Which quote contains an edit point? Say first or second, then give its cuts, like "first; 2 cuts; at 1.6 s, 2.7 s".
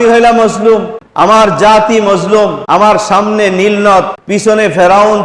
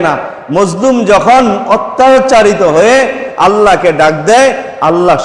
first; 3 cuts; at 1.0 s, 2.6 s, 4.2 s